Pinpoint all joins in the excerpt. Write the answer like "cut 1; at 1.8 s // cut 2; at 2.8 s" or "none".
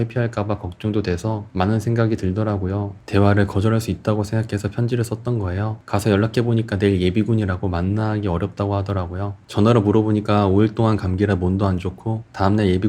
cut 1; at 2.9 s // cut 2; at 9.4 s